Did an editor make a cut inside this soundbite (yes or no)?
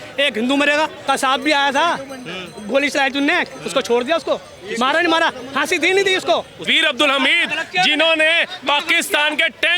yes